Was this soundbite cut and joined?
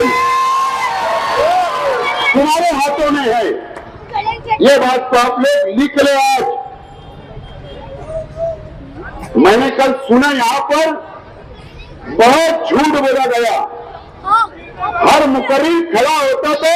no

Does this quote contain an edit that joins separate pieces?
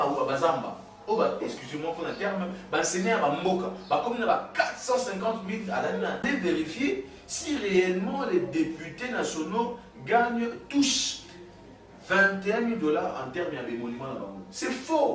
yes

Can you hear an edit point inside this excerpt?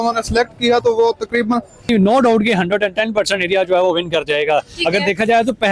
yes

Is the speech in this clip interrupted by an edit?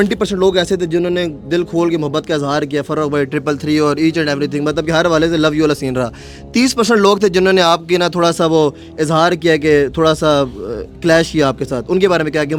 no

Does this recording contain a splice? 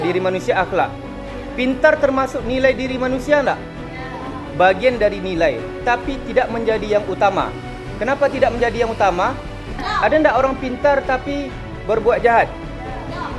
no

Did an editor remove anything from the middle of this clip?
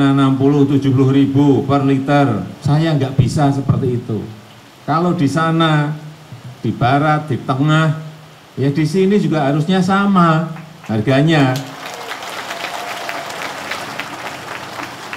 yes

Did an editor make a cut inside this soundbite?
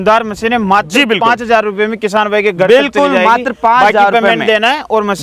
no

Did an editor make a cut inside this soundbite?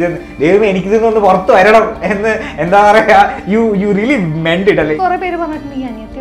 yes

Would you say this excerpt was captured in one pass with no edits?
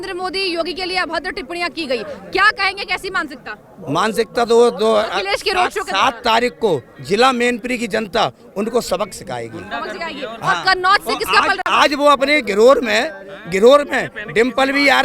yes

